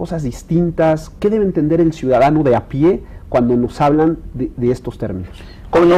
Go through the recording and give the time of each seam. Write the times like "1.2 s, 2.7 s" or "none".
4.9 s